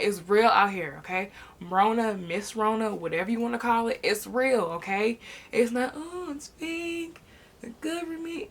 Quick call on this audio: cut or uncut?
uncut